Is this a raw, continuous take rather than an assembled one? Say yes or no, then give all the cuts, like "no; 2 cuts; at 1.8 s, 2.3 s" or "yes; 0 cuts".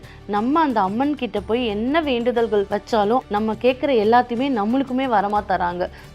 no; 1 cut; at 3.2 s